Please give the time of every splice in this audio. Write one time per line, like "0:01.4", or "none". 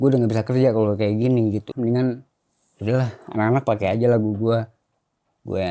0:01.7

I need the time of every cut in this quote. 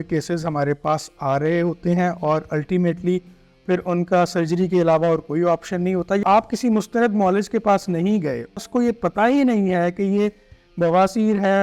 0:06.2
0:08.6

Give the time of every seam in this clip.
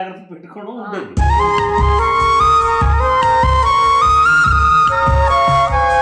none

